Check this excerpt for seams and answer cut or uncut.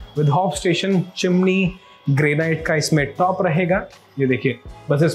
uncut